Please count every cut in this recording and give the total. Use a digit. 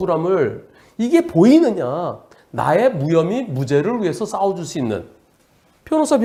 0